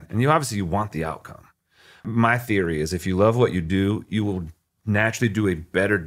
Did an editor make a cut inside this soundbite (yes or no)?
yes